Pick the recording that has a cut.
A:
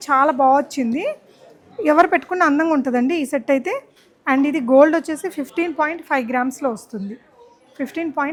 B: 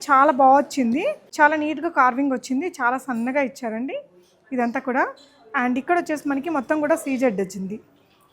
B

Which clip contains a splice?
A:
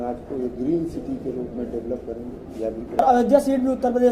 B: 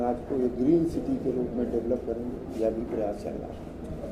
A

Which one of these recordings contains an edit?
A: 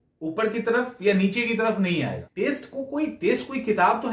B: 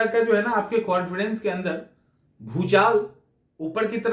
A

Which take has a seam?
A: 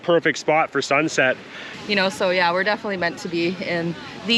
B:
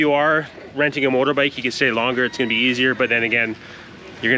A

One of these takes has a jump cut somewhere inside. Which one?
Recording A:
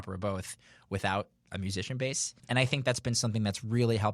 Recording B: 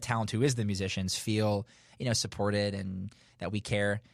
A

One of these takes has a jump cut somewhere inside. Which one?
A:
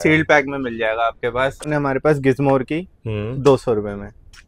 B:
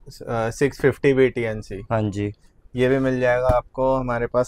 A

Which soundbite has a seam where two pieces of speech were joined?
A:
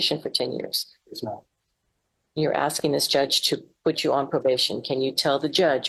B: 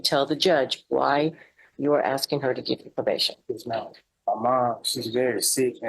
B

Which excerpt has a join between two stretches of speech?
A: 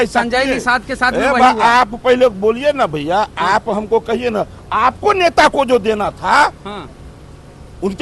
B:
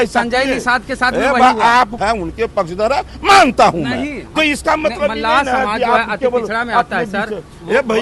B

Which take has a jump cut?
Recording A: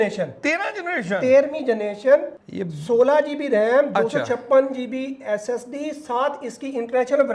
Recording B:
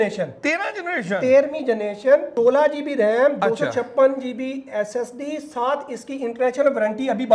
B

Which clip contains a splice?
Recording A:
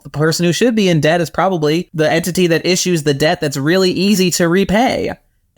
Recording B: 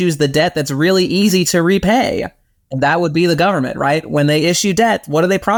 A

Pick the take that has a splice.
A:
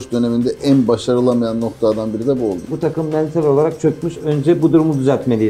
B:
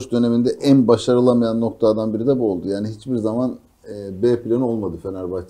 A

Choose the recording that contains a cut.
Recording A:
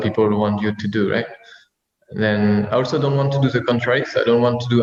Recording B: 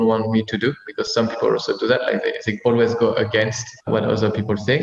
B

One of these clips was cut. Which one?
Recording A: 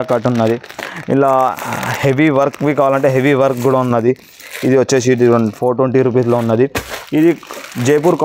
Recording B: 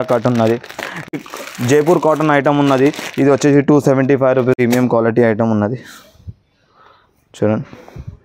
B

